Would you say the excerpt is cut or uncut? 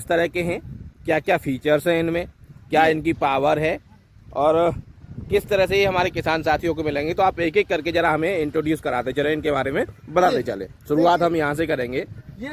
uncut